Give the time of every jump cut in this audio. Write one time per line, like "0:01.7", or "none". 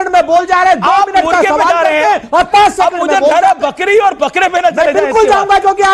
none